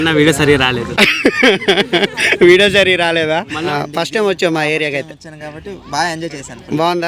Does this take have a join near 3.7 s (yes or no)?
yes